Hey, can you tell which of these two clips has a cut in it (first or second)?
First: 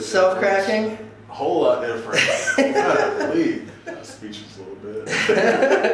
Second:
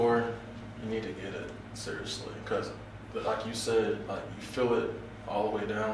first